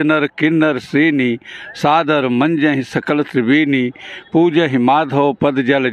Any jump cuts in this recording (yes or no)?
no